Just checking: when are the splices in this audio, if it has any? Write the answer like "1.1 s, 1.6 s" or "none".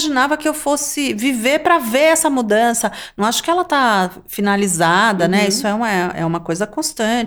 none

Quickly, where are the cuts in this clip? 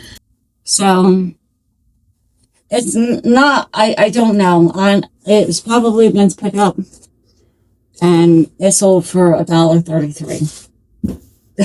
none

